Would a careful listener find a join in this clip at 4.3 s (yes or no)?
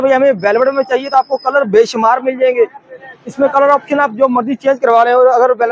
no